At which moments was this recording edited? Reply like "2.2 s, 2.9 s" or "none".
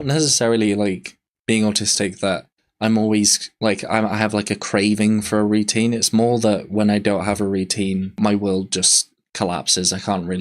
8.1 s